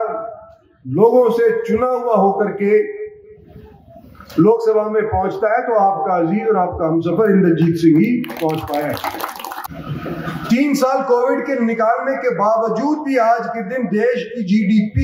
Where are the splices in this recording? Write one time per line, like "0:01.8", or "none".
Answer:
0:09.6